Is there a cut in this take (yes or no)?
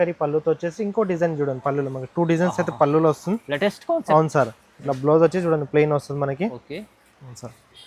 no